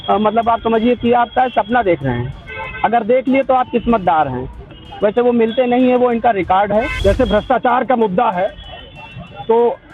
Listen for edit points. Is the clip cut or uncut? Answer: cut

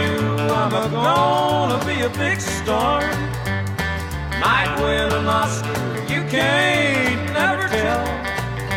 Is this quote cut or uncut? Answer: uncut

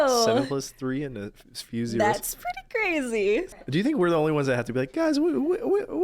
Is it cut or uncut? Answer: cut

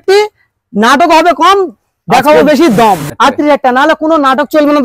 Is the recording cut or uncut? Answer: cut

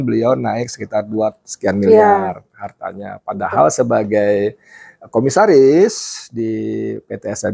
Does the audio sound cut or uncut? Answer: uncut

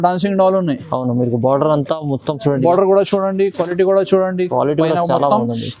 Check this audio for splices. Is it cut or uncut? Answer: uncut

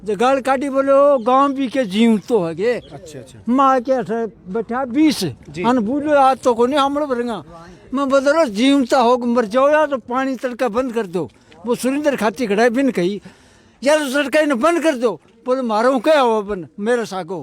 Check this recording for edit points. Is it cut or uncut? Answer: uncut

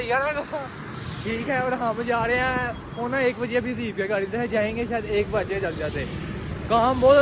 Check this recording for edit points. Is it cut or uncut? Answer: uncut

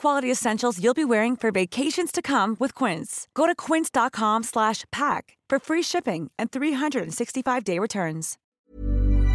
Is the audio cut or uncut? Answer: cut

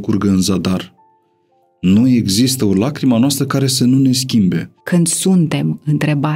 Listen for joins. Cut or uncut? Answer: cut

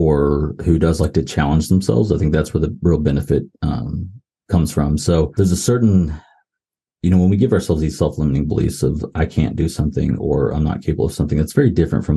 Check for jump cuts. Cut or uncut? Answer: cut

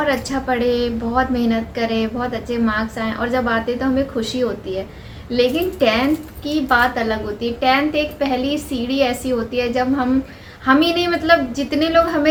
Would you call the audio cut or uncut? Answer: uncut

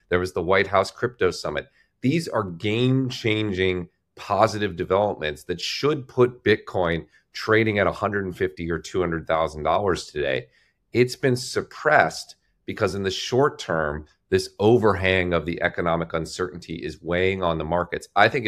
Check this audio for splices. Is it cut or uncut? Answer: uncut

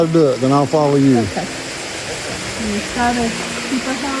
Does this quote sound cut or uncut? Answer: uncut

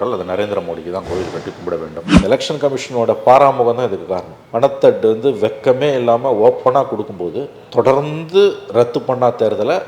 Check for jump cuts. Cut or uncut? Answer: cut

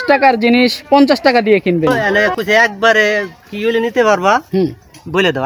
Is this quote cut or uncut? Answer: cut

